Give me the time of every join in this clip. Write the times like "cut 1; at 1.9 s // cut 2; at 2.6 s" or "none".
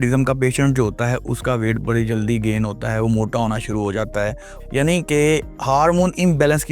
cut 1; at 4.6 s